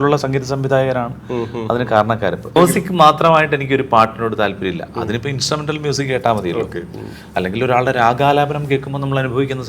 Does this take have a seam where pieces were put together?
yes; 1 cut; at 2.6 s

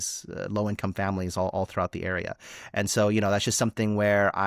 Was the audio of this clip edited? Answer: no; 0 cuts

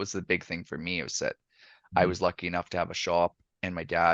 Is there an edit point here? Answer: no; 0 cuts

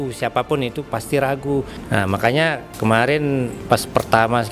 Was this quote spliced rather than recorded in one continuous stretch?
yes; 3 cuts; at 1.8 s, 2.7 s, 3.6 s

